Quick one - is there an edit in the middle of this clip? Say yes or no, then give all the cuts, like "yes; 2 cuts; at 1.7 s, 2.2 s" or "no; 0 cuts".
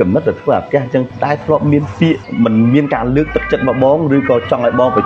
yes; 2 cuts; at 1.1 s, 2.3 s